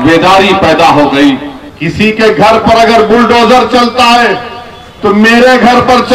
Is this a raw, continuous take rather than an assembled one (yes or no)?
no